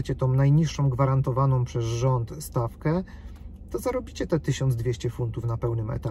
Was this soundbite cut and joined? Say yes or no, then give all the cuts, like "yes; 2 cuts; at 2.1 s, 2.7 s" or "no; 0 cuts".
no; 0 cuts